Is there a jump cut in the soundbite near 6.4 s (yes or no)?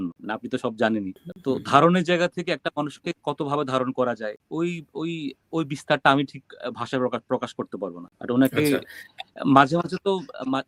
no